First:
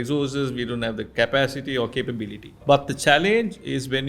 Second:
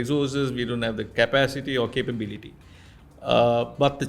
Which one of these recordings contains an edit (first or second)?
first